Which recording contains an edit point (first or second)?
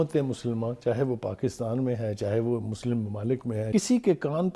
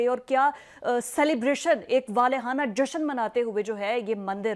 first